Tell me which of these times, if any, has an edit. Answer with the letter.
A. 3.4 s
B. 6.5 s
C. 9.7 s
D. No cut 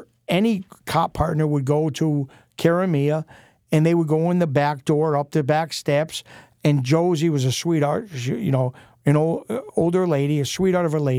D